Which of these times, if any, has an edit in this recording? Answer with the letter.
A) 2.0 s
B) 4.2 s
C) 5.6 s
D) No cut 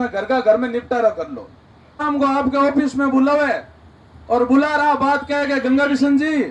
A